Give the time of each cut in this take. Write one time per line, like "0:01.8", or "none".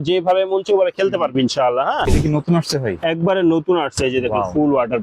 0:02.1